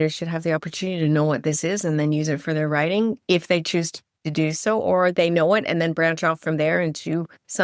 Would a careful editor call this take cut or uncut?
uncut